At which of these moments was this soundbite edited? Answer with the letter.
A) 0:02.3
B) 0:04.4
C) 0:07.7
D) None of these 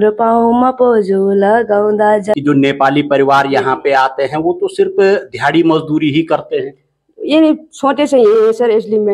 A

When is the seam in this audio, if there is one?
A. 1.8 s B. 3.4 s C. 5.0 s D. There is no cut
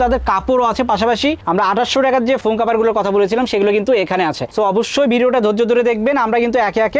D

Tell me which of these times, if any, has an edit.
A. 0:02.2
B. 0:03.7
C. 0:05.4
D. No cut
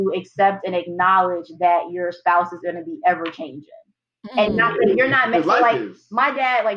D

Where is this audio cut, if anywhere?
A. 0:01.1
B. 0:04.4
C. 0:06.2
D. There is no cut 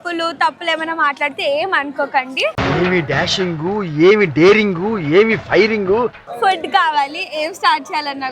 C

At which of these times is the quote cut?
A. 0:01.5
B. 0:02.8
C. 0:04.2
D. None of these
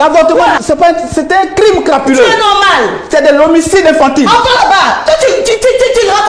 D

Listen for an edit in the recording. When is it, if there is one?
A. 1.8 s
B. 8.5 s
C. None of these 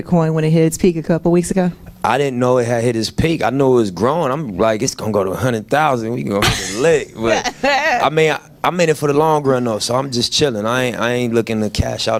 C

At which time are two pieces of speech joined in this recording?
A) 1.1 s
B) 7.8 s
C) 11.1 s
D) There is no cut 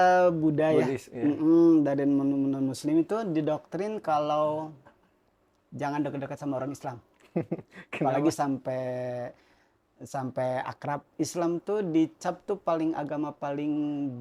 C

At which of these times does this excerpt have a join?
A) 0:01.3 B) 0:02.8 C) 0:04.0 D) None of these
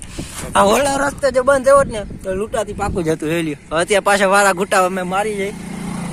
D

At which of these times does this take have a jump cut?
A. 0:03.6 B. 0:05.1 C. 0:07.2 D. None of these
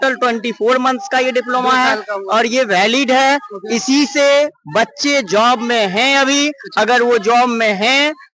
D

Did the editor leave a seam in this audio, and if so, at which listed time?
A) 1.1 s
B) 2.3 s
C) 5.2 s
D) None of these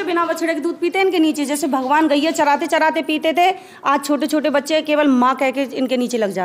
D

